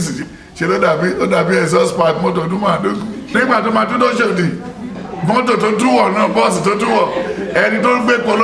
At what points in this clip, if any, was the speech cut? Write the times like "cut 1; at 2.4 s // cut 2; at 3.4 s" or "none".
cut 1; at 3.3 s